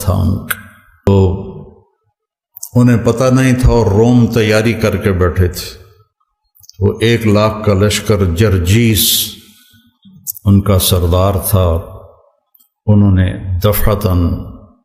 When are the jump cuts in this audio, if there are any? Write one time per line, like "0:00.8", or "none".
0:01.1